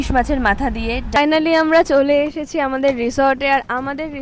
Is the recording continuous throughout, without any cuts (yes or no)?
no